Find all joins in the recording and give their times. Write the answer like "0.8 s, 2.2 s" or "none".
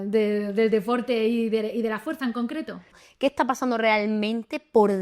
3.0 s